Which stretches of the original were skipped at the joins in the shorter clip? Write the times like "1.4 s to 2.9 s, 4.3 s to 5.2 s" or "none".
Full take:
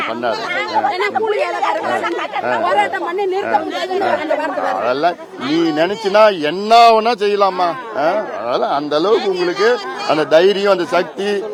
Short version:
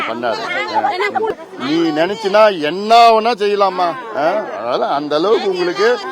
1.3 s to 5.1 s